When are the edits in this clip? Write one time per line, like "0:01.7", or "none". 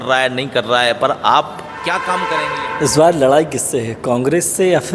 0:02.3